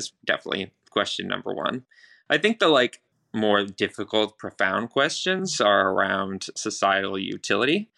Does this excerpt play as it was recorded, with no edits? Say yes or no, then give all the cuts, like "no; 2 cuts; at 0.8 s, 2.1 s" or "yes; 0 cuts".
no; 1 cut; at 3.0 s